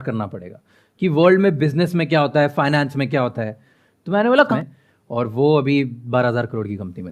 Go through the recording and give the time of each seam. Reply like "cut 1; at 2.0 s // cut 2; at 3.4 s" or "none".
cut 1; at 4.5 s